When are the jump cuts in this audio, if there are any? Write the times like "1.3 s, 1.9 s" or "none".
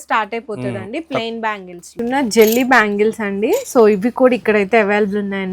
1.9 s